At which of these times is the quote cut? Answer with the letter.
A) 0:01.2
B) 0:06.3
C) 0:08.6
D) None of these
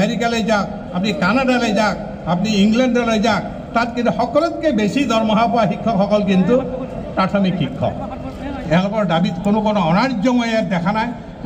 C